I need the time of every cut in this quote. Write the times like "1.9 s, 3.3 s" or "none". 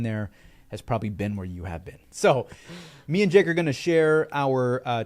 2.0 s